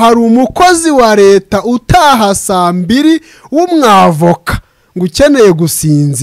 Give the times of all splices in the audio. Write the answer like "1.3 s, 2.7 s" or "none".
none